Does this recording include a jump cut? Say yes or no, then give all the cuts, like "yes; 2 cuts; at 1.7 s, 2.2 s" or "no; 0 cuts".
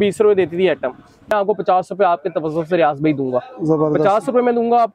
yes; 1 cut; at 1.3 s